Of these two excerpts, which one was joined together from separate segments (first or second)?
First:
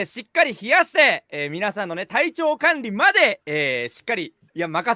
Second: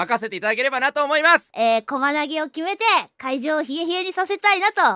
second